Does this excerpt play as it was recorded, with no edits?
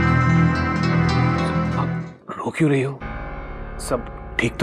no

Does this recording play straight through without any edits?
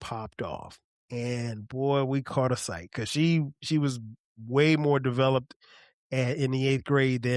yes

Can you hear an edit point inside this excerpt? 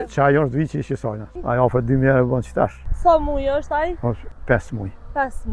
yes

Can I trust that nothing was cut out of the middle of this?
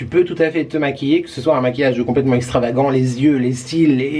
yes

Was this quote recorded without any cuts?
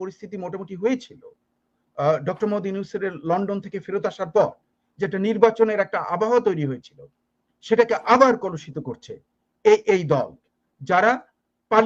yes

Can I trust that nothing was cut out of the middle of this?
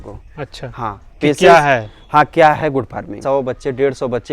no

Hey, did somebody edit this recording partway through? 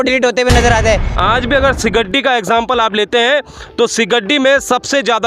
yes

